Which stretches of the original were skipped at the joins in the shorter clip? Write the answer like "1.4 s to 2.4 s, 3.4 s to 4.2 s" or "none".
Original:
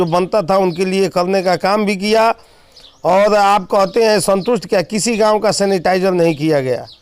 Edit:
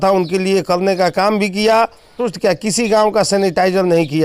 2.7 s to 4.5 s